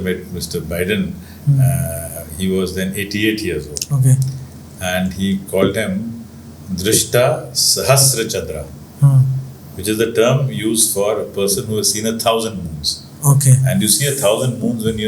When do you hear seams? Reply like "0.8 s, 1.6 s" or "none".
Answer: none